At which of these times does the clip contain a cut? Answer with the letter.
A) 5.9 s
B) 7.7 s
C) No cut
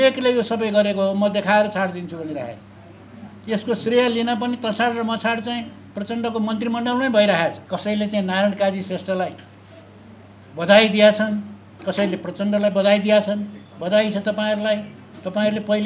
B